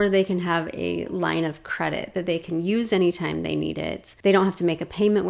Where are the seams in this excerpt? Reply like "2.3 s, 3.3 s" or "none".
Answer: 4.0 s

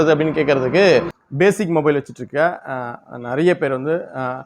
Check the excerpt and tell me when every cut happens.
1.2 s

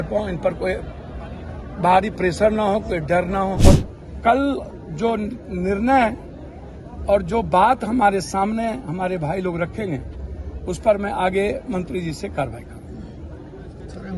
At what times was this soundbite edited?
3.6 s

